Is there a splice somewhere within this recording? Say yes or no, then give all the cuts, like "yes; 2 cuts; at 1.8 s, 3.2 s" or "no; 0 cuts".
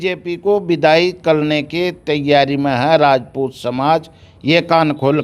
no; 0 cuts